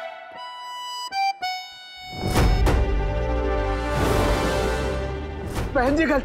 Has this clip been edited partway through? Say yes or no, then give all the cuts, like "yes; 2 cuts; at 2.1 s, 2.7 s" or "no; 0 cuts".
no; 0 cuts